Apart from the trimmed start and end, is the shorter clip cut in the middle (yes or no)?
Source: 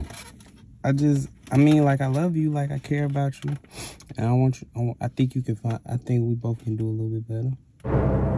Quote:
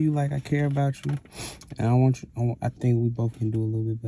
yes